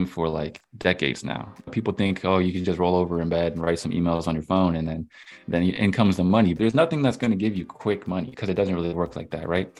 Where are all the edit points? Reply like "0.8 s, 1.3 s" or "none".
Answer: 1.7 s, 6.5 s, 8.3 s